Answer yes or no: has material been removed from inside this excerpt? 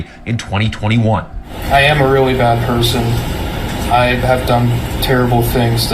no